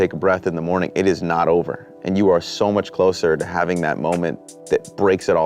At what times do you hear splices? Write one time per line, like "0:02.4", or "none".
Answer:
0:04.5